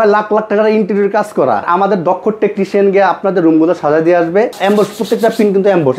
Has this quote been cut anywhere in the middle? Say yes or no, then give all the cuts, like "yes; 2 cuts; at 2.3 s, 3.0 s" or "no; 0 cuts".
yes; 2 cuts; at 1.7 s, 4.6 s